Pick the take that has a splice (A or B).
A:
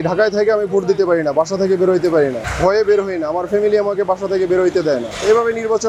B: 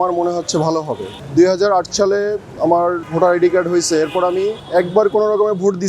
B